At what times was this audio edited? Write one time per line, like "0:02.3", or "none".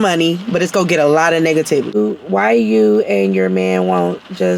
0:02.0